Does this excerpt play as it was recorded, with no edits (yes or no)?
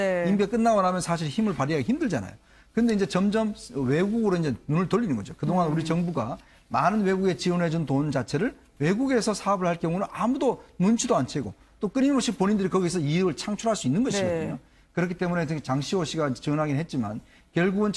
yes